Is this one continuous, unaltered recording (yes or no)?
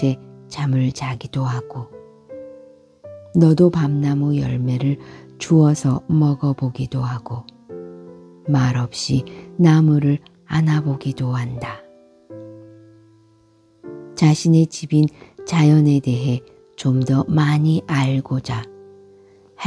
yes